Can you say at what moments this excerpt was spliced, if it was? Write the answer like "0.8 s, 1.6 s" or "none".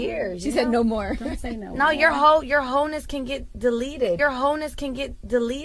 none

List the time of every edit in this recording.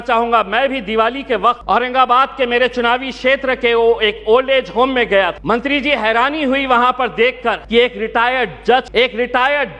1.6 s, 5.4 s, 7.6 s, 8.9 s

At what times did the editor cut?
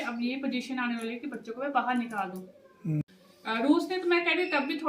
3.0 s

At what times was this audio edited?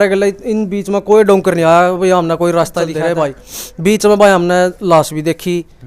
2.9 s

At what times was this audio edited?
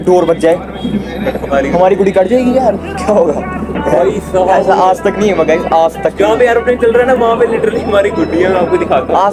none

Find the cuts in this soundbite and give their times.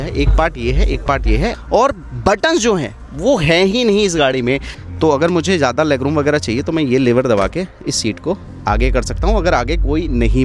1.6 s, 4.7 s

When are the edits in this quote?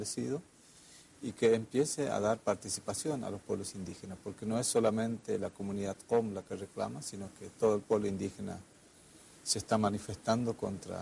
8.5 s

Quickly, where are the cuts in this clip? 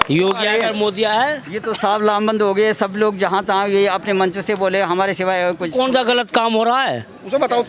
none

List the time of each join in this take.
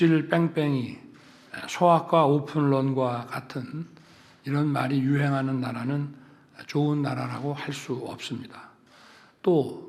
none

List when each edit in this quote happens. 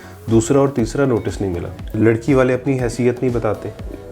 1.9 s

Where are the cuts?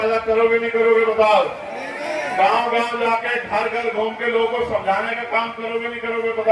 none

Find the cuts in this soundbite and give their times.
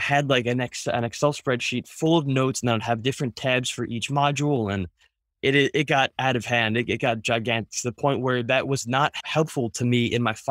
9.2 s

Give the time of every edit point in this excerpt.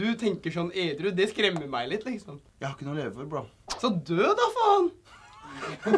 2.4 s, 3.6 s

